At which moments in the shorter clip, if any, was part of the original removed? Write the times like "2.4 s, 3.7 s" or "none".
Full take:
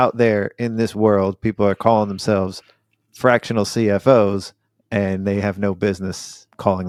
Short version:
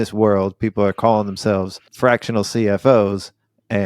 1.8 s